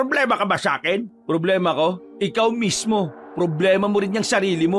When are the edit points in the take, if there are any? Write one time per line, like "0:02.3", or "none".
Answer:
0:01.1
0:02.1
0:03.2